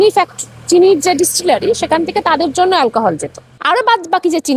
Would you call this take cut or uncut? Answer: cut